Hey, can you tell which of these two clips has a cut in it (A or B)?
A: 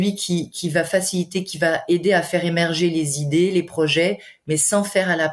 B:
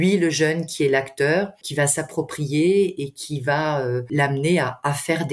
B